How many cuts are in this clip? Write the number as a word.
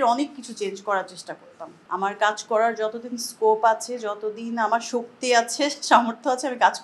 one